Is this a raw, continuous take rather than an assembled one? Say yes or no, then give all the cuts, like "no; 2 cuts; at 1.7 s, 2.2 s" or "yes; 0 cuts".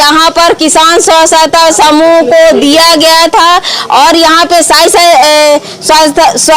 yes; 0 cuts